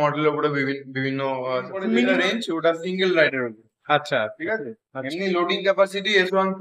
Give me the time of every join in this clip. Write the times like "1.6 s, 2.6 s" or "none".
2.1 s